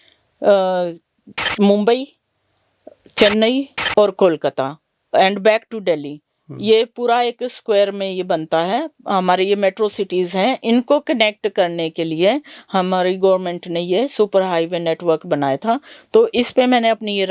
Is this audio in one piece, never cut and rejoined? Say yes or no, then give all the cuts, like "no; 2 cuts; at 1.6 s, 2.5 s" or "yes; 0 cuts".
yes; 0 cuts